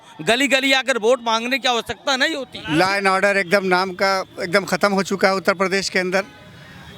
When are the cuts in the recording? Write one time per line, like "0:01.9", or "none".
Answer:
0:02.5